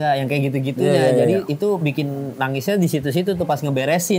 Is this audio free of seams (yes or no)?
yes